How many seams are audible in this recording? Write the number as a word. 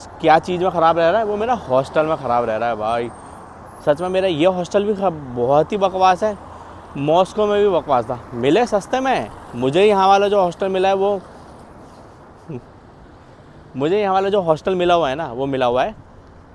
zero